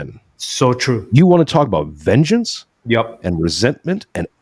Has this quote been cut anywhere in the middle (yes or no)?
no